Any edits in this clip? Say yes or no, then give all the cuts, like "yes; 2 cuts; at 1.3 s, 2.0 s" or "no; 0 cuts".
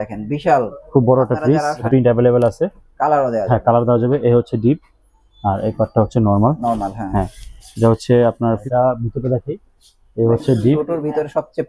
yes; 2 cuts; at 1.9 s, 8.6 s